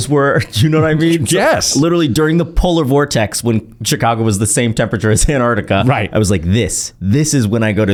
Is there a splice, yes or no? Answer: no